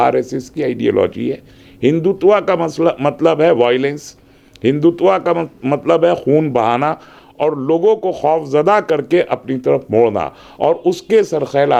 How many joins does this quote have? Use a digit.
0